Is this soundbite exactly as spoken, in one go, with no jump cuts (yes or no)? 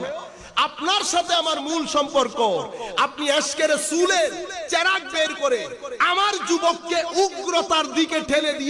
yes